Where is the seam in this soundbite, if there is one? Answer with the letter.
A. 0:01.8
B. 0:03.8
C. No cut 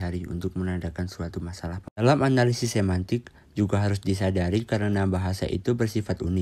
A